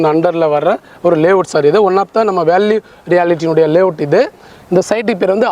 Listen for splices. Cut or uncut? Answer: uncut